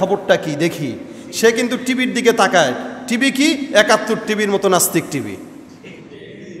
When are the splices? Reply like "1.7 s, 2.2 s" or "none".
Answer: none